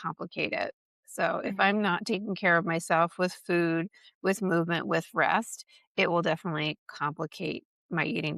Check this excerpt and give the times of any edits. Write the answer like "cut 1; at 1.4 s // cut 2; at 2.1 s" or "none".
none

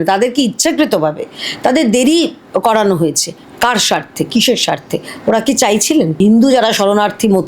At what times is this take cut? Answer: cut 1; at 6.2 s

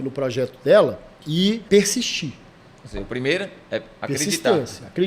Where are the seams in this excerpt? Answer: cut 1; at 1.6 s

